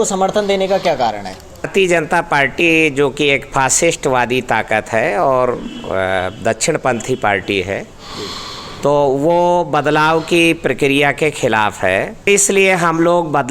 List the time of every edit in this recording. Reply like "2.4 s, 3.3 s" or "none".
1.7 s, 12.3 s